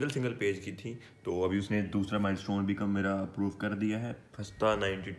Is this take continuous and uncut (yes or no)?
yes